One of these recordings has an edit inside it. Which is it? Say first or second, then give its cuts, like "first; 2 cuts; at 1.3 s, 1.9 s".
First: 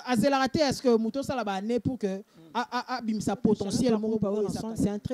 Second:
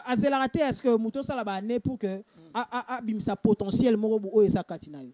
first; 1 cut; at 4.2 s